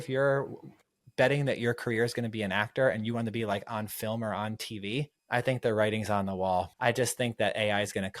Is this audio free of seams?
no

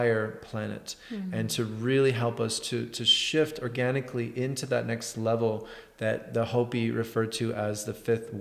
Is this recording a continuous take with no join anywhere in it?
yes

